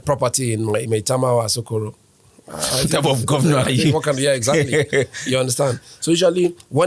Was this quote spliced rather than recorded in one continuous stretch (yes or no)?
no